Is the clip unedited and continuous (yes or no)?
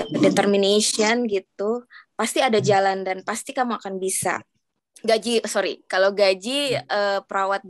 no